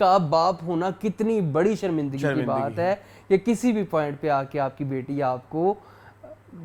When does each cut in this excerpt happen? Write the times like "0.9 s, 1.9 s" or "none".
none